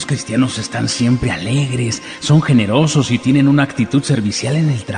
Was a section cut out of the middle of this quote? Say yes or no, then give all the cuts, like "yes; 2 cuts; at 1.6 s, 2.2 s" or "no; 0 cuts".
no; 0 cuts